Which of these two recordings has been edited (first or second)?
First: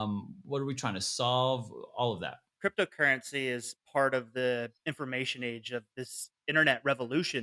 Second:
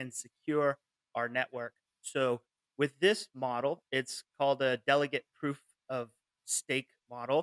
first